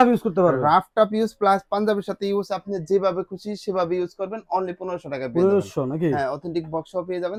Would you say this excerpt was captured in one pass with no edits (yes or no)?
yes